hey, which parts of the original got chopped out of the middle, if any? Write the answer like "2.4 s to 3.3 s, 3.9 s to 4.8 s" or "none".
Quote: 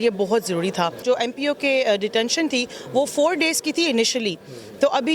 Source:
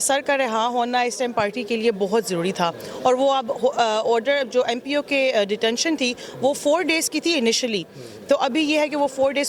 2.8 s to 4.5 s